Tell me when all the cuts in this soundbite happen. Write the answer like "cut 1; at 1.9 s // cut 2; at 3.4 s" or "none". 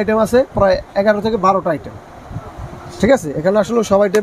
none

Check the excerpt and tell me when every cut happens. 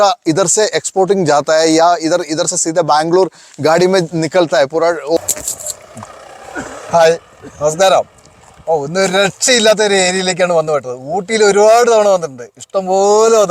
cut 1; at 5.2 s

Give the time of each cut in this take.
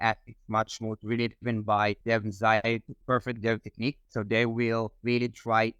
cut 1; at 2.9 s

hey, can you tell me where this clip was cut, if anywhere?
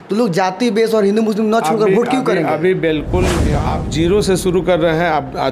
cut 1; at 3.5 s

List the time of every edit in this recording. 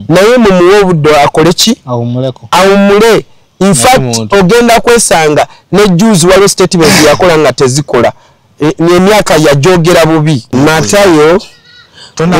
cut 1; at 10.5 s

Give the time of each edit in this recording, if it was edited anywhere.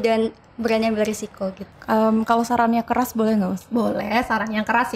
cut 1; at 1.7 s

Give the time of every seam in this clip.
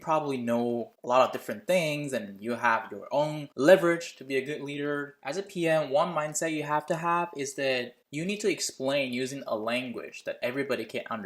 cut 1; at 5.1 s

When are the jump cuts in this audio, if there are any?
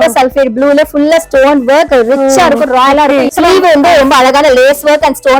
cut 1; at 3.3 s

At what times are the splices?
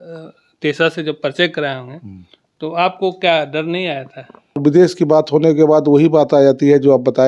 cut 1; at 4.6 s

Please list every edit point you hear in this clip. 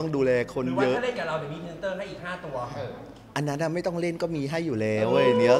none

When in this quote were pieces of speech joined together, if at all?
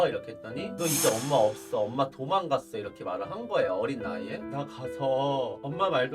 cut 1; at 4.4 s

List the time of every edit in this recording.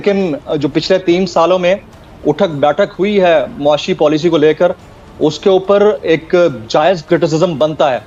none

